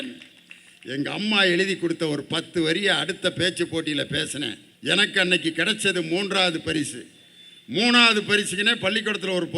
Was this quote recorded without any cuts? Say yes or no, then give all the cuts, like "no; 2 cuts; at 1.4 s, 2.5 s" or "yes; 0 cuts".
no; 1 cut; at 4.7 s